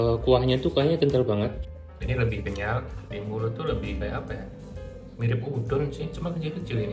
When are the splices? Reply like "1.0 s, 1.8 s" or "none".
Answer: 1.6 s, 3.0 s